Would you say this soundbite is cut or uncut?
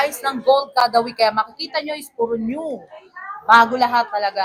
uncut